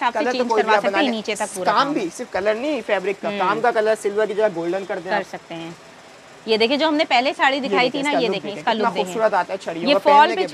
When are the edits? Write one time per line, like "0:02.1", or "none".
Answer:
none